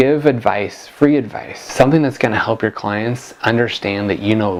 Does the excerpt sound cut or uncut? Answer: uncut